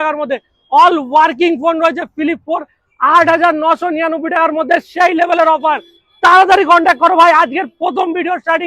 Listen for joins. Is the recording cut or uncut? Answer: uncut